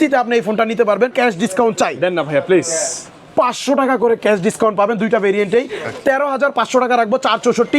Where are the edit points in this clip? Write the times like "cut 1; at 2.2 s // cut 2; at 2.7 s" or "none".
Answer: cut 1; at 1.1 s